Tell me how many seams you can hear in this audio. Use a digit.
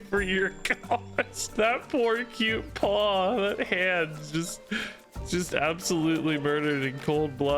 1